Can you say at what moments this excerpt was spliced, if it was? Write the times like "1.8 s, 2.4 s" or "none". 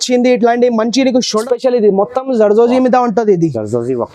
1.4 s